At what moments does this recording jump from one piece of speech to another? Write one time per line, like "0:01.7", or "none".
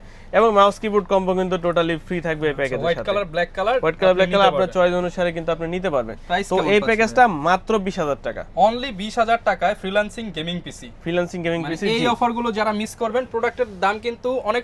none